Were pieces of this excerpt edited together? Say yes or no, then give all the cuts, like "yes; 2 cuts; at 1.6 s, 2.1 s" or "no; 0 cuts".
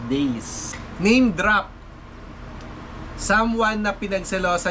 yes; 1 cut; at 1.0 s